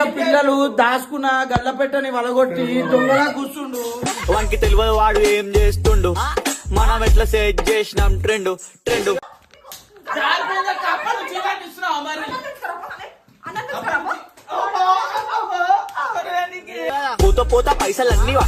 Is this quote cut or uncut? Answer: uncut